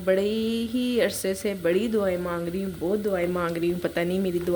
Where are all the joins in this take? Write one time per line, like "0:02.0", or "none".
none